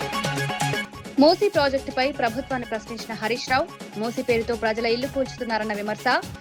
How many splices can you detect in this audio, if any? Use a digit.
1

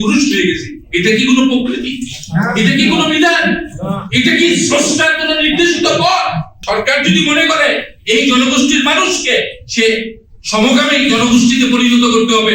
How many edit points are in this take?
1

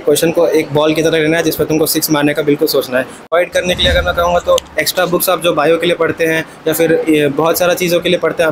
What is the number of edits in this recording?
1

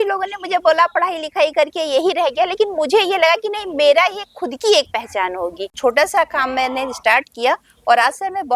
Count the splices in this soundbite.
1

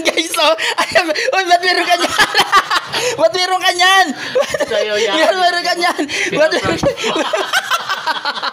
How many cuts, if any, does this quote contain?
0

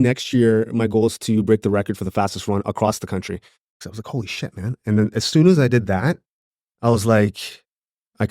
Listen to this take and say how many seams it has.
1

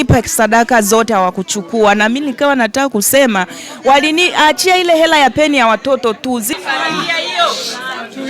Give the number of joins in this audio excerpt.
1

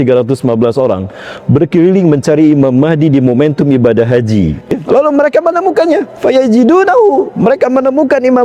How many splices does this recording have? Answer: 1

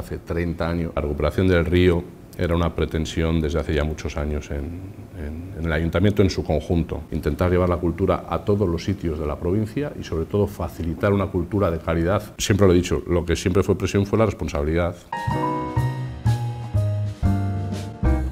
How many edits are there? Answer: 4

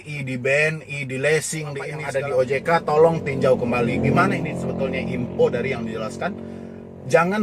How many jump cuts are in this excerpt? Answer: 1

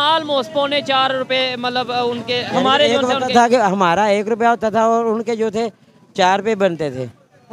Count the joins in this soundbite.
0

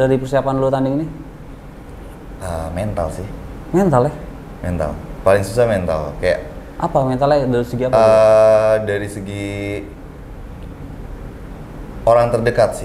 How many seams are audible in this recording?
0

